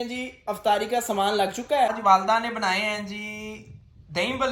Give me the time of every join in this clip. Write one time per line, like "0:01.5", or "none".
0:02.0